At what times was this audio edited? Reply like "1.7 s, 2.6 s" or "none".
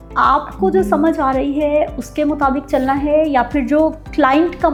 none